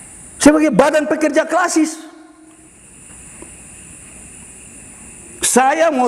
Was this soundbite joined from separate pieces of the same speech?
yes; 1 cut; at 2.6 s

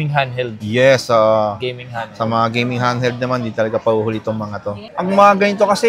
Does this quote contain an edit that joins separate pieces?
yes; 1 cut; at 4.8 s

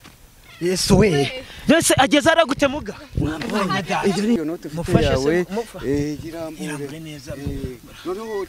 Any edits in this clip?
yes; 1 cut; at 4.4 s

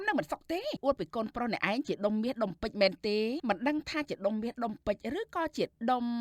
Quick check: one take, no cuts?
no; 2 cuts; at 0.8 s, 3.4 s

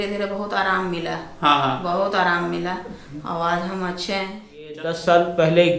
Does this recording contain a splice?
yes; 1 cut; at 4.8 s

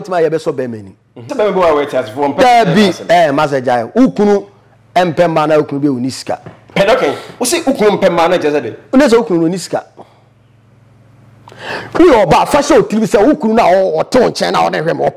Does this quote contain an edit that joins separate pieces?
yes; 2 cuts; at 1.2 s, 6.6 s

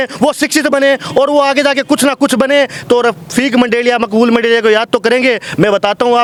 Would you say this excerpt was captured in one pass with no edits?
yes; 0 cuts

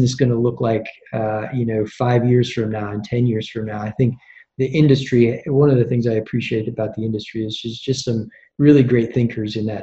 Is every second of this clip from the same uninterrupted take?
yes; 0 cuts

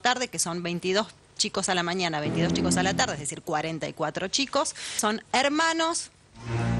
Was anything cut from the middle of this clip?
yes; 1 cut; at 5.0 s

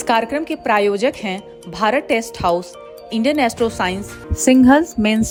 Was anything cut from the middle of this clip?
no; 0 cuts

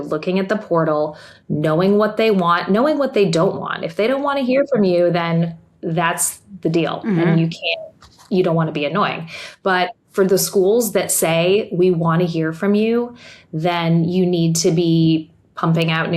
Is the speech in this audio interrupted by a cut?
no; 0 cuts

